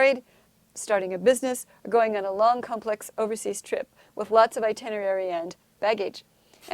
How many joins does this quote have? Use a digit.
0